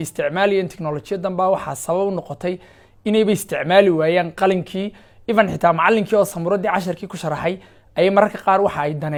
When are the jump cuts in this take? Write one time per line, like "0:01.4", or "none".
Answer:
none